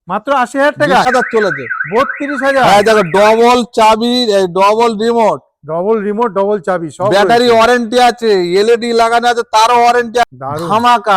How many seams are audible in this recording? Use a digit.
2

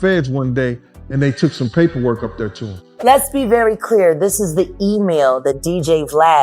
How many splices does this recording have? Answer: 1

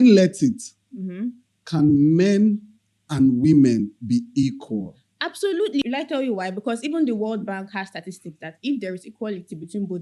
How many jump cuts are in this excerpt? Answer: 1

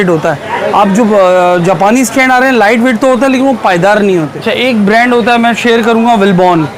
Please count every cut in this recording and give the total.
1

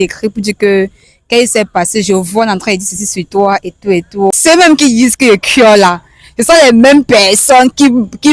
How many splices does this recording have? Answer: 1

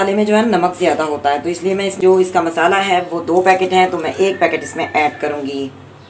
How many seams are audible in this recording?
1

